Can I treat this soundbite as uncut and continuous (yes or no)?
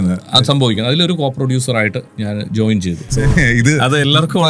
no